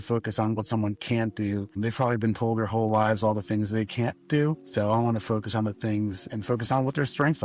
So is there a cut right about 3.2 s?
no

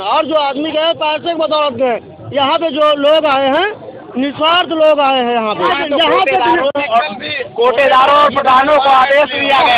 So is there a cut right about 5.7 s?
yes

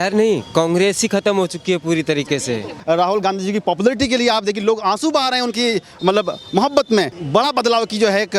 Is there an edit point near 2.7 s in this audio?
yes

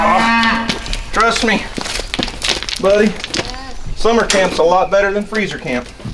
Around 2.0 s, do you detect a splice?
no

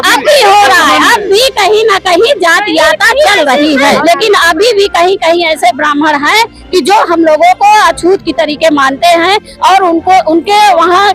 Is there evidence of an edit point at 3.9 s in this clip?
yes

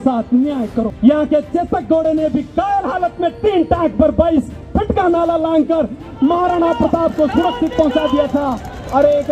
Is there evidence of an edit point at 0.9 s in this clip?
yes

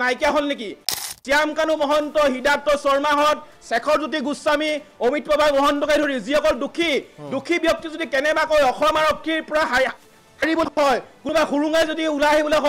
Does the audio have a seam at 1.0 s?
yes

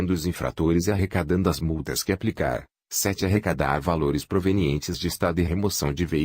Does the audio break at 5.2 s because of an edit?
no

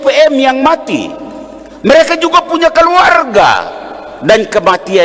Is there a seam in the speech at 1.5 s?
no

